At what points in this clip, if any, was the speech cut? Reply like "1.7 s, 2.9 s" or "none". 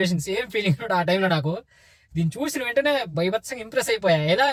none

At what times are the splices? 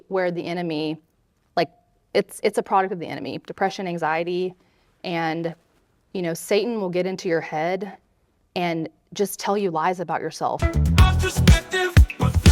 10.6 s

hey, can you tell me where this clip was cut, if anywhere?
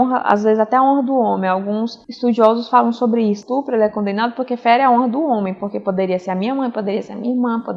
none

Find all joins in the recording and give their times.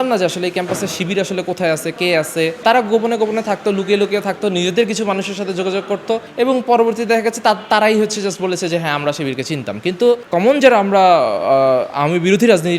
2.6 s, 6.3 s, 10.2 s

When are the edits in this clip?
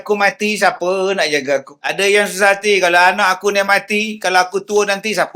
1.8 s

